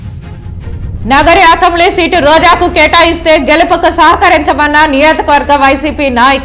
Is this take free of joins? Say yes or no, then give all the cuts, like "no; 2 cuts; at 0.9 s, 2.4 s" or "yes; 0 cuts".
no; 1 cut; at 0.9 s